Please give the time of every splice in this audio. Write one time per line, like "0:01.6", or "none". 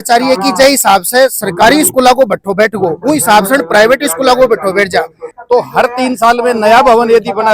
0:05.2